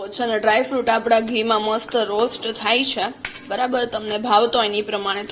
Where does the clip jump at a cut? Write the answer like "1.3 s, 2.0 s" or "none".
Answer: none